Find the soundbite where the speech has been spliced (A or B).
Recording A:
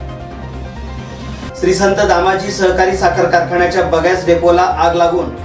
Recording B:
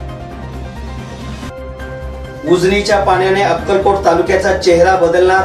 A